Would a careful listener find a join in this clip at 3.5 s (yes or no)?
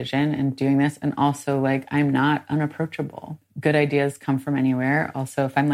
yes